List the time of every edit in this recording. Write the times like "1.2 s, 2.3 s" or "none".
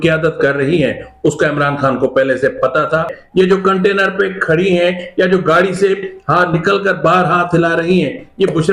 3.2 s